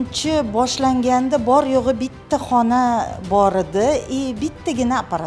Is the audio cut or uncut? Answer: uncut